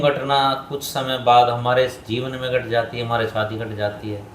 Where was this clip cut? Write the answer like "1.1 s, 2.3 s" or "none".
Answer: none